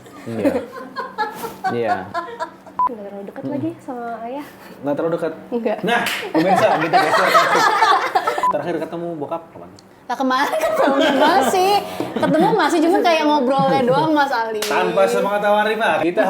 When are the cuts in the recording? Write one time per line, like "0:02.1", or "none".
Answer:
0:02.6
0:08.4